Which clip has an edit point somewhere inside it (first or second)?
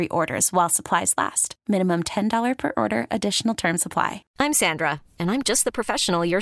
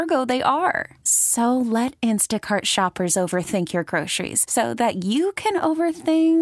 first